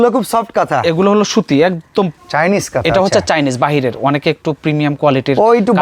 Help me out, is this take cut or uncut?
cut